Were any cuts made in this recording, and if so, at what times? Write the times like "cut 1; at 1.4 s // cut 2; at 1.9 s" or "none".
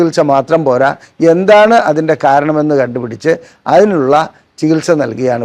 none